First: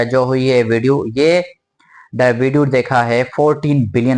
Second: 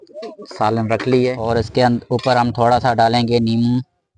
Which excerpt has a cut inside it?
second; 1 cut; at 1.4 s

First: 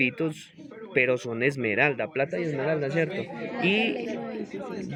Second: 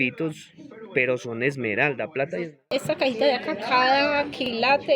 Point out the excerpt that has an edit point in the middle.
second; 1 cut; at 2.7 s

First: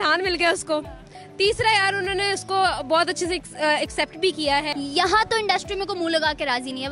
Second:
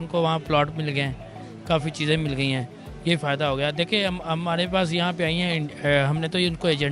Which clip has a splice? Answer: first; 1 cut; at 4.7 s

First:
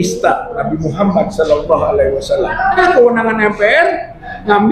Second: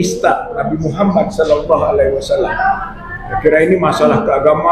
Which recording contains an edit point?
first; 1 cut; at 2.8 s

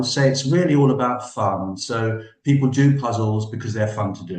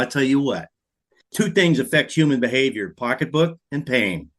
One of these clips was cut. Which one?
second; 1 cut; at 1.2 s

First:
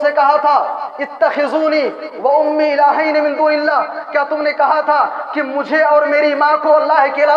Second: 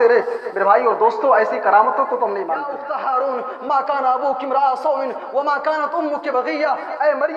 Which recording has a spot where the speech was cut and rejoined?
second; 1 cut; at 2.7 s

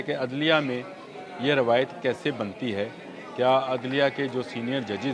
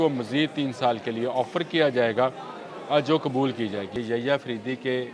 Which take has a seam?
second; 1 cut; at 3.9 s

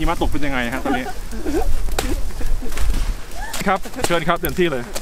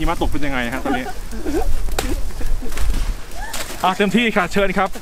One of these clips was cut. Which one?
first; 1 cut; at 3.6 s

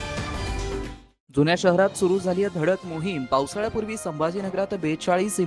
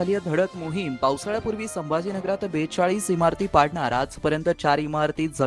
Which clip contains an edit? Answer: first; 1 cut; at 0.9 s

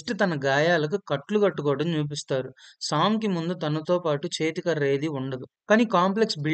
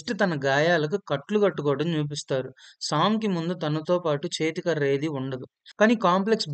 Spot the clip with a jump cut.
first; 1 cut; at 5.5 s

